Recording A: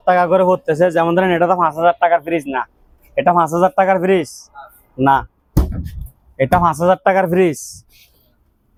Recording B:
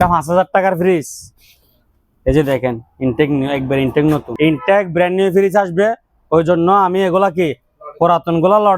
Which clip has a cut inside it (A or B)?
B